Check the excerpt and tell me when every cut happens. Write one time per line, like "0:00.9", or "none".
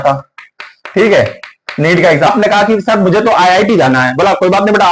0:02.3